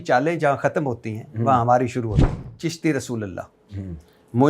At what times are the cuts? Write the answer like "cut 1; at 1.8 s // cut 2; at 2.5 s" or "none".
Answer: cut 1; at 2.4 s

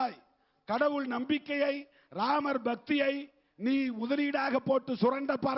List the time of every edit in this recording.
none

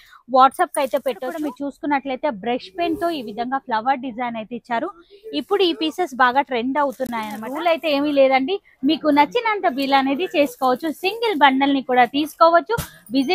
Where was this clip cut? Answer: cut 1; at 1.5 s // cut 2; at 7.5 s

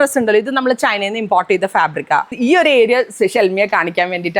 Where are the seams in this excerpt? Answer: cut 1; at 2.4 s

